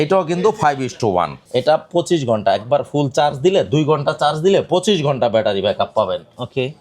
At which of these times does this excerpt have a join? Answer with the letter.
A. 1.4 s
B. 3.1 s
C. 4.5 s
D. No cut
A